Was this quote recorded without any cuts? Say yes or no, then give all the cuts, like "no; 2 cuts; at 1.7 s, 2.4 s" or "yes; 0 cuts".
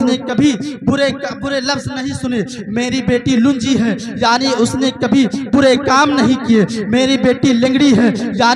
yes; 0 cuts